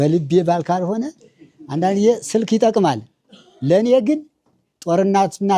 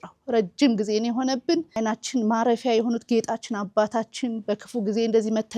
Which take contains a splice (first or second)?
second